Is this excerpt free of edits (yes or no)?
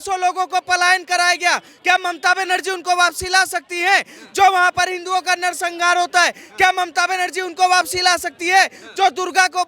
yes